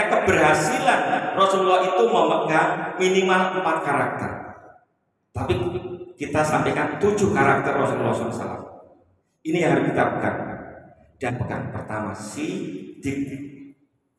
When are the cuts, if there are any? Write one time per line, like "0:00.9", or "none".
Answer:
0:11.3